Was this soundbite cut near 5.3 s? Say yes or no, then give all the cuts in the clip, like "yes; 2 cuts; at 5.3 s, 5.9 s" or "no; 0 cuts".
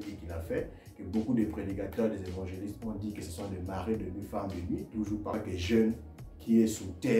yes; 1 cut; at 5.3 s